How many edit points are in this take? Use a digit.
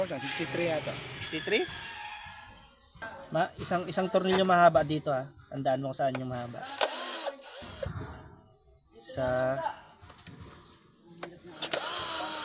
2